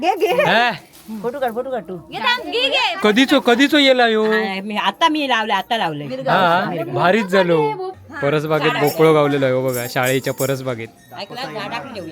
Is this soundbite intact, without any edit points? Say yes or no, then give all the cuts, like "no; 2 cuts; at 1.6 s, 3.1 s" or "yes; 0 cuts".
no; 1 cut; at 8.0 s